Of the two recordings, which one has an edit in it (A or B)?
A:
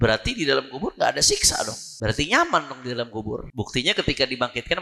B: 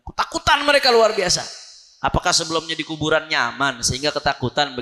A